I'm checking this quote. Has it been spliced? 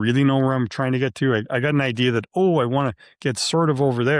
no; 0 cuts

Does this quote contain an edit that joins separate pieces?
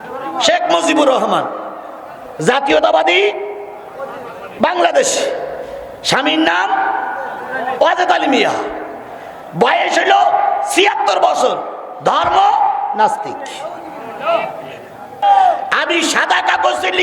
yes; 1 cut; at 15.2 s

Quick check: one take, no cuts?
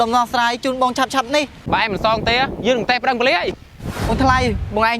no; 2 cuts; at 1.6 s, 4.1 s

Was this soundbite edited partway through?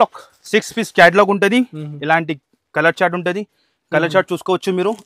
no; 0 cuts

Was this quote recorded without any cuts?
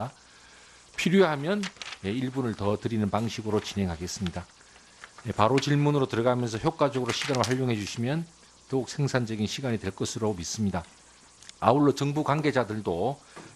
no; 1 cut; at 12.1 s

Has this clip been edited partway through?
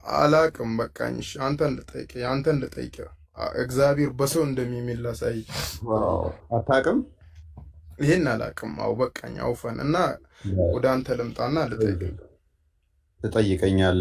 no; 0 cuts

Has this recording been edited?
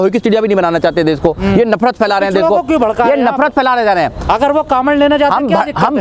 no; 0 cuts

